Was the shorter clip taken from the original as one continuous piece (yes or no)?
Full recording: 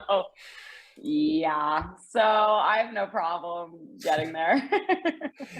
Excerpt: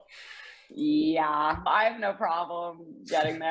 no